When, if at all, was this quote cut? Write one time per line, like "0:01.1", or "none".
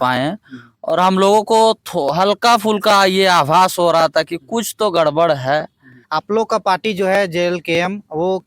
0:06.0